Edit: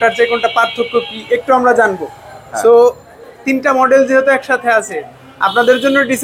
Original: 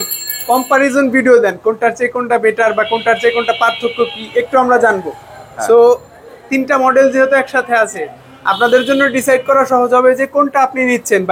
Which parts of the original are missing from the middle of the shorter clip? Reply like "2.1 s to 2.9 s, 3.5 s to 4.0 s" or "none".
none